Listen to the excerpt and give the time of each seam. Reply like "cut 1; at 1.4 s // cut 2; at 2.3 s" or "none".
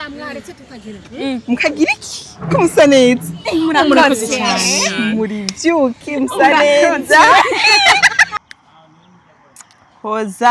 cut 1; at 8.3 s